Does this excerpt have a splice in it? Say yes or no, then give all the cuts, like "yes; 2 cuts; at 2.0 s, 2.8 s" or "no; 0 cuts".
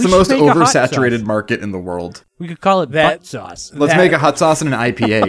yes; 1 cut; at 2.2 s